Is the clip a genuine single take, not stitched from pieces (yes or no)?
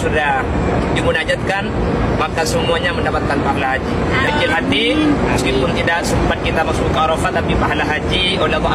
no